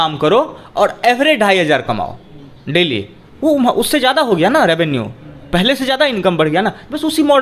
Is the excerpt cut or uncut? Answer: uncut